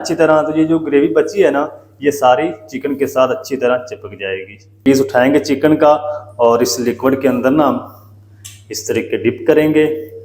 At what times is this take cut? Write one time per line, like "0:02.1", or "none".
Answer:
0:04.8